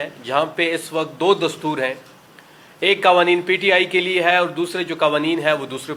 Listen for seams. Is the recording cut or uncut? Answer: uncut